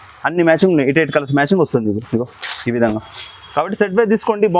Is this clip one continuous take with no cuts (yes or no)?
yes